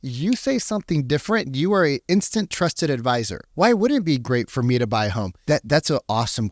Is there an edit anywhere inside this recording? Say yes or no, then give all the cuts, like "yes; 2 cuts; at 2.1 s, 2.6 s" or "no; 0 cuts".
no; 0 cuts